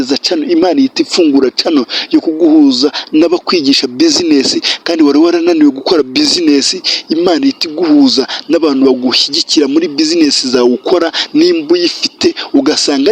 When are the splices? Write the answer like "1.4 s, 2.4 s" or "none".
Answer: none